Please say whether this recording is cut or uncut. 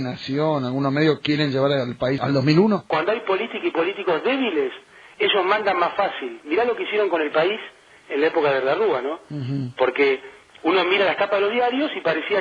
cut